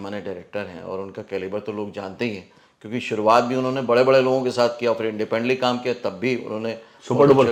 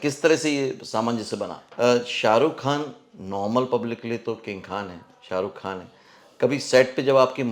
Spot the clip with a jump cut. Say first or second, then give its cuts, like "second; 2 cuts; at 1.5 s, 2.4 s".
second; 1 cut; at 1.6 s